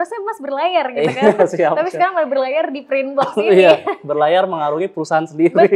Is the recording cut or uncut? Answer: uncut